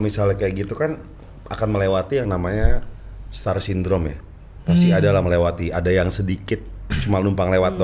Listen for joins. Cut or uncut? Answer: uncut